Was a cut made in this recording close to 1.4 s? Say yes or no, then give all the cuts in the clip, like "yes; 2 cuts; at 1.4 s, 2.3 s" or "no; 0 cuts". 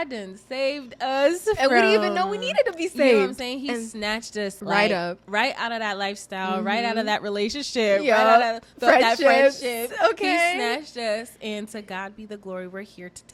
yes; 2 cuts; at 1.4 s, 4.6 s